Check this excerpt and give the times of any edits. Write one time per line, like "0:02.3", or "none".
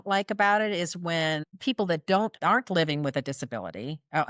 0:01.5
0:02.4